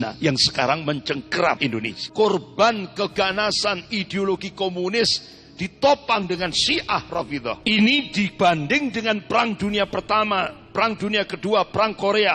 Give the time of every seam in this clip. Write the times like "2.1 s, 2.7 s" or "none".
1.7 s, 7.6 s